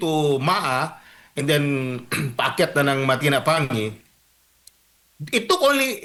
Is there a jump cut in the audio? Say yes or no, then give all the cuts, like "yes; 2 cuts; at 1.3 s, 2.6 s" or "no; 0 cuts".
no; 0 cuts